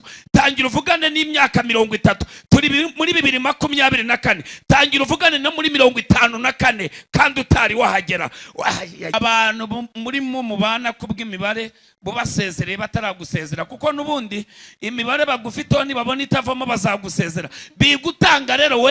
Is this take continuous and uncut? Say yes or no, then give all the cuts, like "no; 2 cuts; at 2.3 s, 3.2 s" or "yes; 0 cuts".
no; 1 cut; at 9.1 s